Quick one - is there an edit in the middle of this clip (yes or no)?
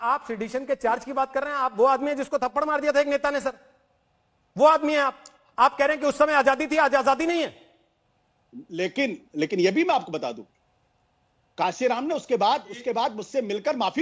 no